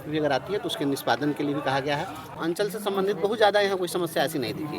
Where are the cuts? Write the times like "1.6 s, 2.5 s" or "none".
2.3 s